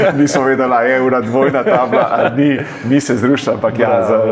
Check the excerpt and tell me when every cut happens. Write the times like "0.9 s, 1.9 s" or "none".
none